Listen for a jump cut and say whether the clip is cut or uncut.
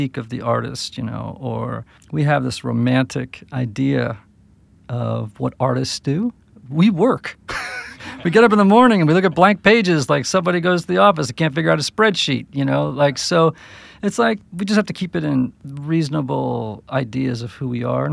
cut